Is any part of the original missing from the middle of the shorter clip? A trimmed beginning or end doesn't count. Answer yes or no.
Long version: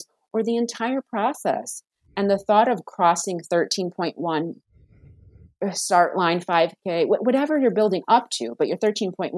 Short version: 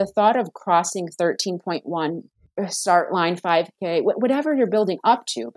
yes